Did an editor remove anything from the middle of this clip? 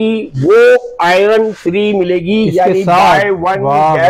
no; 0 cuts

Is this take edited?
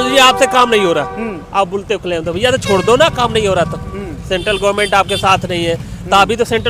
no; 0 cuts

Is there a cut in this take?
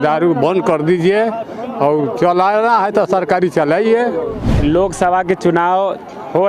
yes; 1 cut; at 4.4 s

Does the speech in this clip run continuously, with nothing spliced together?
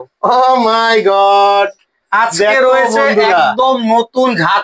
yes; 0 cuts

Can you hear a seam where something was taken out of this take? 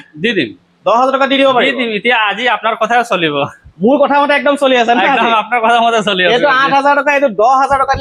no; 0 cuts

